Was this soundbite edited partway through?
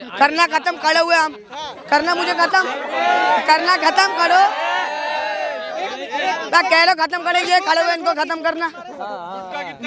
no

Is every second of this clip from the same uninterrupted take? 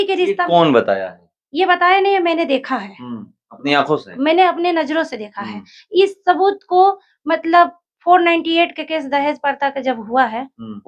yes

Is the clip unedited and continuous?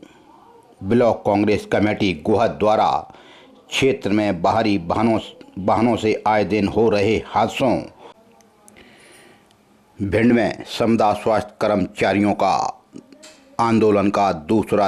no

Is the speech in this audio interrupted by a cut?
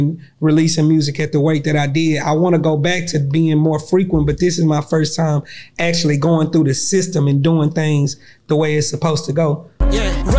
no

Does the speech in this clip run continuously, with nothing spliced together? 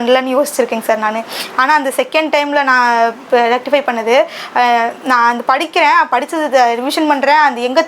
yes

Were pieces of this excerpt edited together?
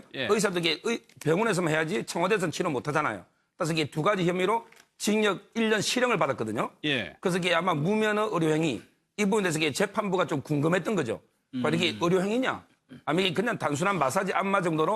no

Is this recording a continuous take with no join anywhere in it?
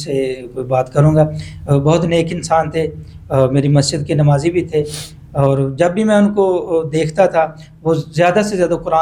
yes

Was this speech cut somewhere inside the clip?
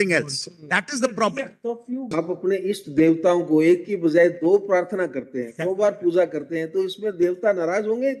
yes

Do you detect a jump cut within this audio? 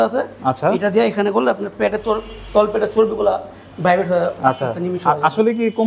no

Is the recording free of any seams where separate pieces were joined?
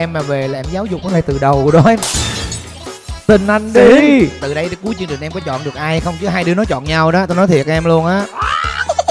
yes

